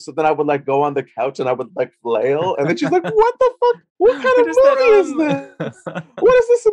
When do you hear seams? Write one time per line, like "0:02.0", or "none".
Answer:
0:03.9